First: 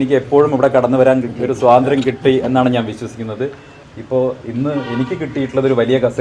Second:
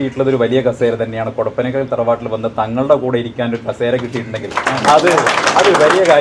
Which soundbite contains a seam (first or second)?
first